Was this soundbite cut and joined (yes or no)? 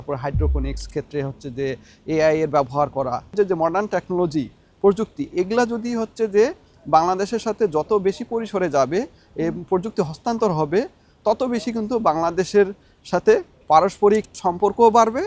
yes